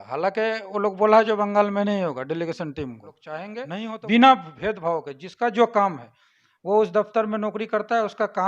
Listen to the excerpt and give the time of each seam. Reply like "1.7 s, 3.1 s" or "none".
3.6 s